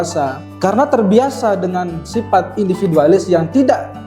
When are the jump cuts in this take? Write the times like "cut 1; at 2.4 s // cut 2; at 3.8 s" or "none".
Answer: none